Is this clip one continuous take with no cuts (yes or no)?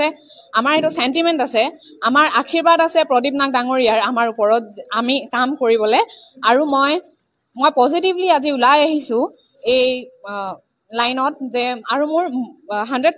yes